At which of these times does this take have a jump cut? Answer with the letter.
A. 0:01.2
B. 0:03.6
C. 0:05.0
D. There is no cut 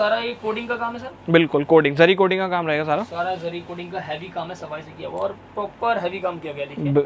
D